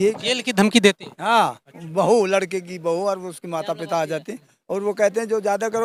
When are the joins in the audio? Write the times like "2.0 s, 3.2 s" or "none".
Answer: none